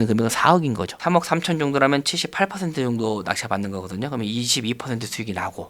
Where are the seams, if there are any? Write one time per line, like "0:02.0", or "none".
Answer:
0:01.0